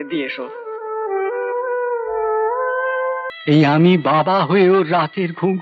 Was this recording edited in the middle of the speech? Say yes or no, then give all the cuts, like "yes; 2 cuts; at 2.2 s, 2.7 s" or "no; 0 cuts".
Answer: yes; 1 cut; at 3.3 s